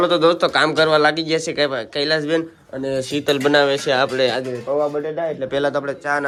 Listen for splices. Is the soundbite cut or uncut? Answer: uncut